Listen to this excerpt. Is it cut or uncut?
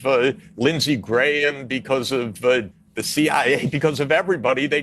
cut